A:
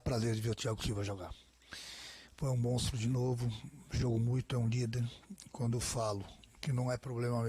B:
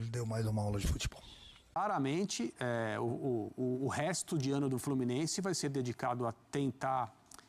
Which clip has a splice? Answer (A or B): B